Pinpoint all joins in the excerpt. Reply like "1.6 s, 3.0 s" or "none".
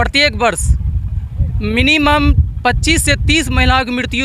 none